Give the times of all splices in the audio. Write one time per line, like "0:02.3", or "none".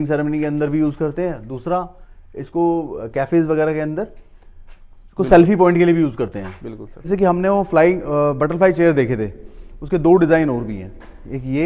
0:07.1